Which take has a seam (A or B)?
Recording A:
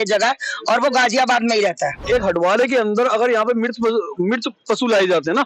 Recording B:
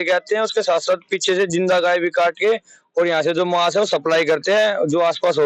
A